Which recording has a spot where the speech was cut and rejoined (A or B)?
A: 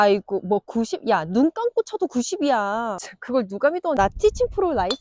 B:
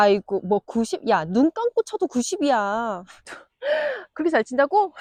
A